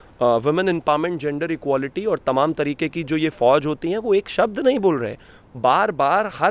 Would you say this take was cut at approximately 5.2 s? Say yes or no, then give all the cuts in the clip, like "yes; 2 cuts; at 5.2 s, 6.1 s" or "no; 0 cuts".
no; 0 cuts